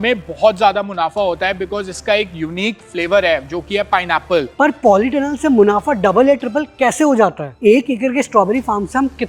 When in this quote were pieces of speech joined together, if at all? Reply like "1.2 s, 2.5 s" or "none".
4.5 s, 7.5 s